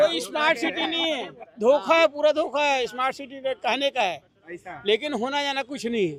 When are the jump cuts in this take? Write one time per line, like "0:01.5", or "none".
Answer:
none